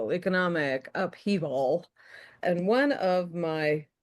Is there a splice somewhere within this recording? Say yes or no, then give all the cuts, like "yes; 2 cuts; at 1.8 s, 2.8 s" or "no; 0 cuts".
yes; 1 cut; at 2.4 s